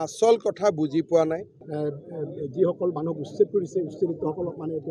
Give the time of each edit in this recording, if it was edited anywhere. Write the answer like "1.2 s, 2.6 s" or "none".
1.2 s